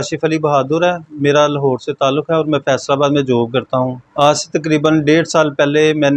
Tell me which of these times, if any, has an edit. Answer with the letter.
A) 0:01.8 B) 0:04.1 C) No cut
C